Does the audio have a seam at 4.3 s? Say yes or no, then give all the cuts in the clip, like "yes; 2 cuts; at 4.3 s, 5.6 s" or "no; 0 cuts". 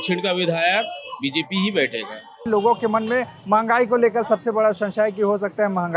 no; 1 cut; at 2.5 s